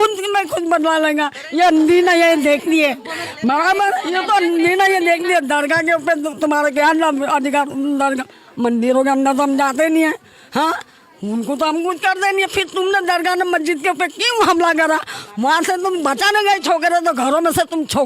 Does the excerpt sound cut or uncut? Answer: uncut